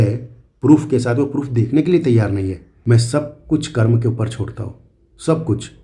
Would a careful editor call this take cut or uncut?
cut